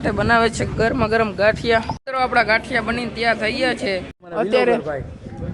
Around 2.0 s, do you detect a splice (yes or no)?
yes